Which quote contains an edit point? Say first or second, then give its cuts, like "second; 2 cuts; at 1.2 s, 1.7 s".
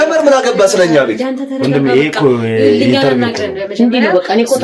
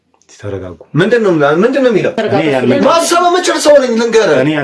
second; 1 cut; at 2.2 s